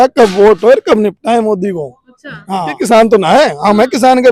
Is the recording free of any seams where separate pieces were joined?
no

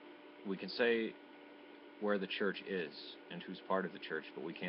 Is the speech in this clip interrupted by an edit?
yes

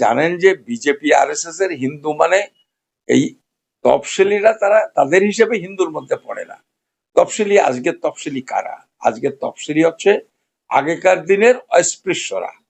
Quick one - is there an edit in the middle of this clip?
no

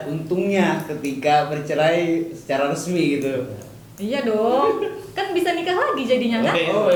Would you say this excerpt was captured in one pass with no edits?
yes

